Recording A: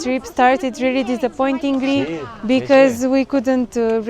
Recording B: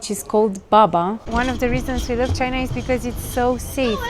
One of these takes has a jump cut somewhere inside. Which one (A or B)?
B